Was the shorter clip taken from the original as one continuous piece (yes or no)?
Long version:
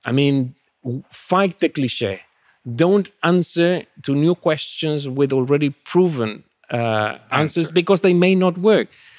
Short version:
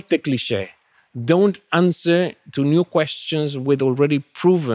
yes